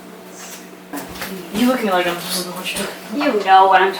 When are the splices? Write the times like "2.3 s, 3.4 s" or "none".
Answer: 0.9 s